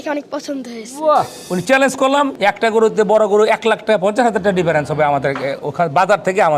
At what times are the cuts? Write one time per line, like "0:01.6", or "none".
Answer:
0:01.4
0:02.3

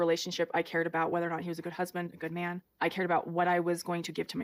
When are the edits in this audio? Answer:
none

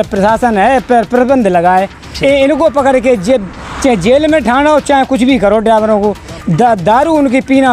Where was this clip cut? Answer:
none

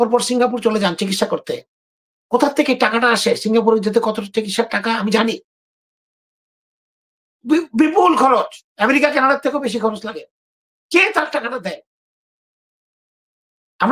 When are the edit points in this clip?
none

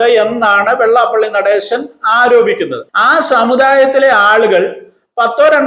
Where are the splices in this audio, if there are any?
0:02.8

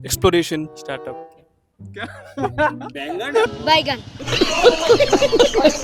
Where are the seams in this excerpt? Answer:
none

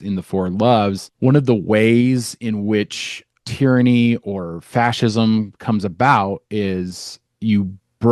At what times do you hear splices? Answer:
0:01.1

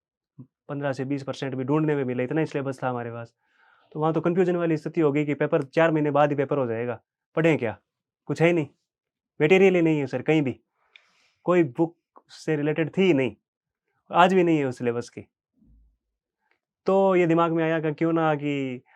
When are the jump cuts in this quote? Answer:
none

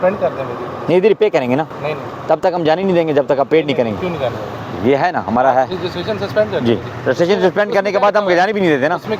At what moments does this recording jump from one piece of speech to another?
none

